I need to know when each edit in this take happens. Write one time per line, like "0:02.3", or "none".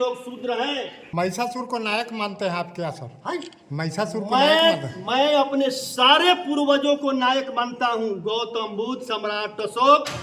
0:01.0